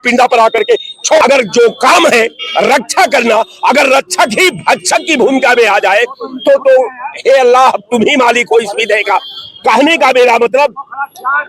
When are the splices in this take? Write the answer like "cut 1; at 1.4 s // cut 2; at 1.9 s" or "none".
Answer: cut 1; at 1.2 s

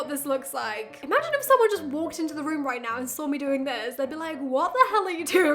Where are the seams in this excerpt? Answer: cut 1; at 0.9 s

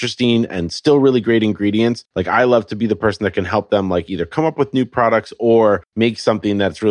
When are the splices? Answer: cut 1; at 2.1 s // cut 2; at 5.9 s

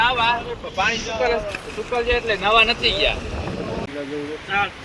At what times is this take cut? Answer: cut 1; at 3.8 s

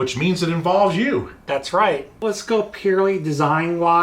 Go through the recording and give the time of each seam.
cut 1; at 2.1 s

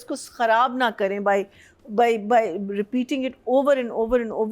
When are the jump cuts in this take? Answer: none

